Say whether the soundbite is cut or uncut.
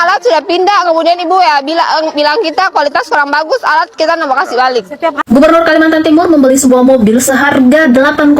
cut